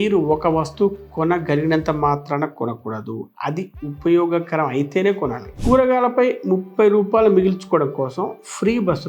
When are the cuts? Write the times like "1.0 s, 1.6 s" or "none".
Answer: 5.5 s